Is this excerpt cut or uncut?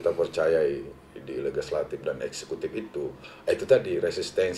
uncut